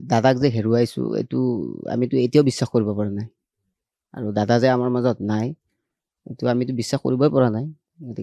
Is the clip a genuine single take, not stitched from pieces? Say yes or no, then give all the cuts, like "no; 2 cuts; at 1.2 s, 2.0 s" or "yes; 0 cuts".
yes; 0 cuts